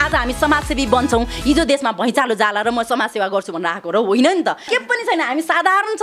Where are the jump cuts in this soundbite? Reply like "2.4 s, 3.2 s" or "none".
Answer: 4.6 s